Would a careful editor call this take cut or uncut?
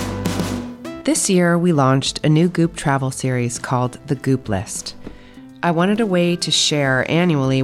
cut